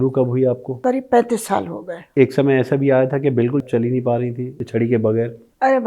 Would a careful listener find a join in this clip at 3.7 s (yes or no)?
yes